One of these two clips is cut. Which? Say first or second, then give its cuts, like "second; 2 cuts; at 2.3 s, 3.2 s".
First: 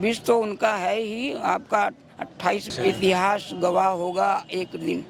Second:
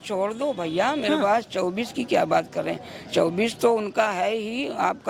first; 1 cut; at 2.7 s